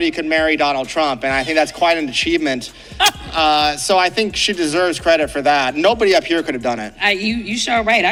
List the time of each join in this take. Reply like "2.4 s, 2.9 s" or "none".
none